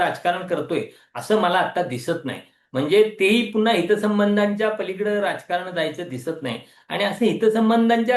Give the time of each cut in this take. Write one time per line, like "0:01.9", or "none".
none